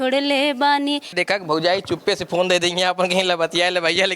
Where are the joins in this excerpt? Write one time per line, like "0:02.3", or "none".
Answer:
0:01.2